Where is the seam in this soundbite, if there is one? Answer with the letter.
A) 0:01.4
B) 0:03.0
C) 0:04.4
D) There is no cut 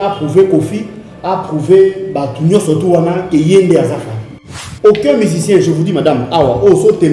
C